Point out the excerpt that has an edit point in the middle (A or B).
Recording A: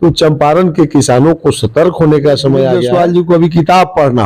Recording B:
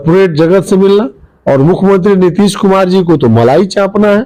A